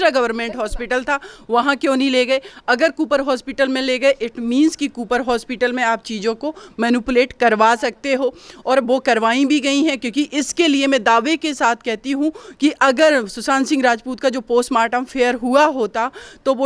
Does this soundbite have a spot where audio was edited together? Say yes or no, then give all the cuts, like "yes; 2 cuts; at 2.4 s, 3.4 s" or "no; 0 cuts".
no; 0 cuts